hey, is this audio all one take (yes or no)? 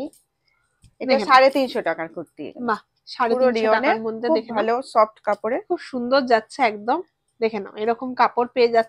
yes